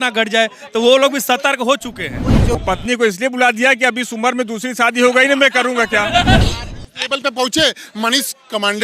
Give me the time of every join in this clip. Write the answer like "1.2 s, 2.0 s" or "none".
2.5 s, 6.4 s